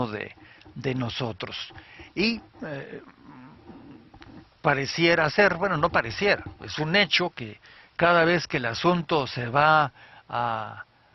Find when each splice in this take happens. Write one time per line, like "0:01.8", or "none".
none